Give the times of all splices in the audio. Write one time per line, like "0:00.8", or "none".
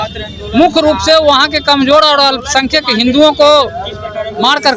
none